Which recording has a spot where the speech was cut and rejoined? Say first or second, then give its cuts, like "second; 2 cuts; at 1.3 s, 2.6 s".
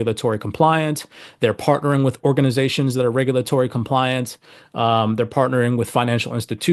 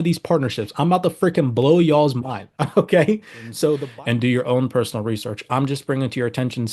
second; 1 cut; at 3.8 s